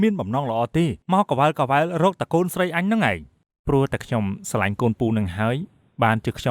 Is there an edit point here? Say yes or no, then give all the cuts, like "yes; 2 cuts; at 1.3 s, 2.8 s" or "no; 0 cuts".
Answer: yes; 1 cut; at 1.0 s